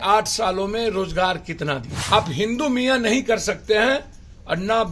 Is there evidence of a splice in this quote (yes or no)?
yes